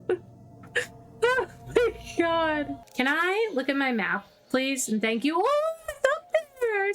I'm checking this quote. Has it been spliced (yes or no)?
yes